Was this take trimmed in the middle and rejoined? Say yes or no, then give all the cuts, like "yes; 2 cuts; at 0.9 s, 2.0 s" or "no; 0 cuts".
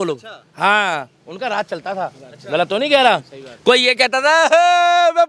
no; 0 cuts